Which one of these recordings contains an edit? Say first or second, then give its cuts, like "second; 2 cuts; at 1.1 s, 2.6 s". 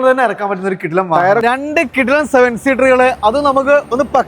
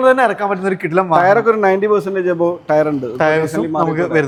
first; 1 cut; at 1.4 s